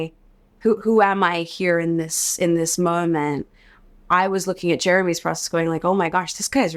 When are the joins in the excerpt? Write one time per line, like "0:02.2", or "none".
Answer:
none